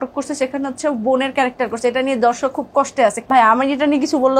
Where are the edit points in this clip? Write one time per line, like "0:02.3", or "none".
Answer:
0:03.3